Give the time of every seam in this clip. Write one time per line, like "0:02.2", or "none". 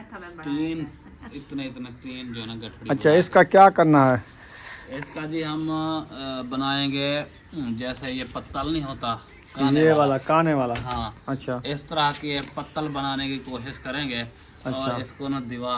none